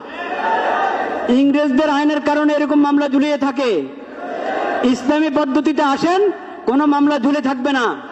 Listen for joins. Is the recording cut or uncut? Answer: uncut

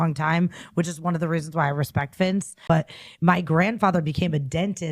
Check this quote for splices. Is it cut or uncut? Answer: cut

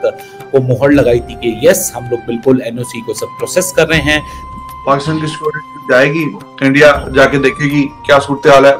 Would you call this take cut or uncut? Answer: cut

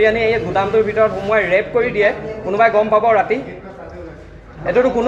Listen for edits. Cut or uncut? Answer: uncut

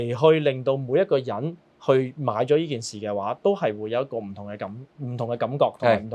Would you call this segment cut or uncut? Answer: uncut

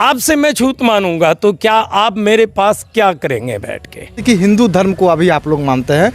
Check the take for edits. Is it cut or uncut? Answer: cut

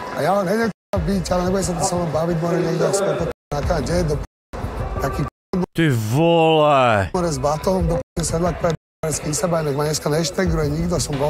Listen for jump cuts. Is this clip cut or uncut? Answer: uncut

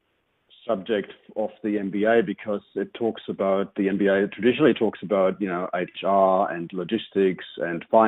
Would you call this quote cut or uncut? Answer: cut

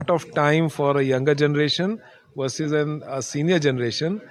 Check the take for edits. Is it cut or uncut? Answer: uncut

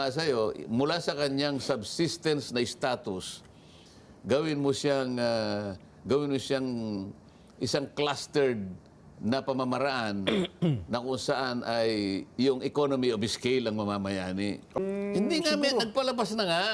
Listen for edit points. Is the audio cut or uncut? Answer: cut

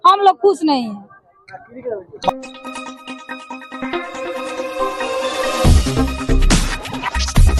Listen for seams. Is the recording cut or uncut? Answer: uncut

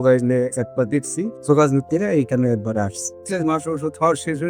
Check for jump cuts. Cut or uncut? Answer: cut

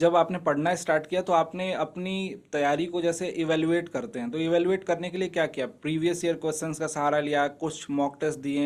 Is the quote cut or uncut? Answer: uncut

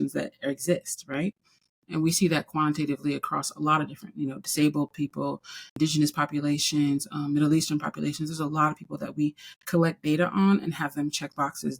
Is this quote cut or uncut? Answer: cut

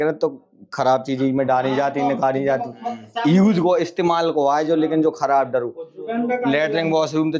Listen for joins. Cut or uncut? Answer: uncut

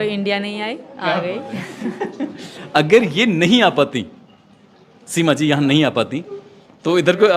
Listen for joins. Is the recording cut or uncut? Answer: cut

